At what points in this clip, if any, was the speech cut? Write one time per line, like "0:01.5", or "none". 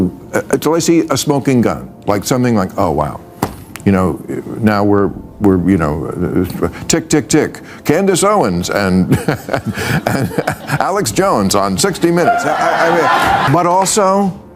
0:13.5